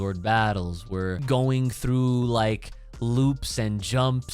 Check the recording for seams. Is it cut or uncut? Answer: cut